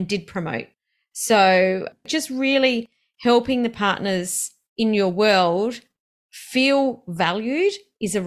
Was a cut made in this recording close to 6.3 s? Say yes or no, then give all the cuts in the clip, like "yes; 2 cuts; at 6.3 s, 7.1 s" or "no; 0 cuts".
no; 1 cut; at 2.0 s